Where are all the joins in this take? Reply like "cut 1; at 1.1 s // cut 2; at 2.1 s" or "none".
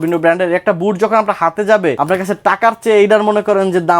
cut 1; at 2.0 s